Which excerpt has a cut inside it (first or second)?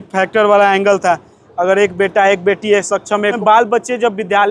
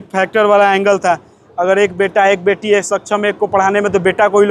first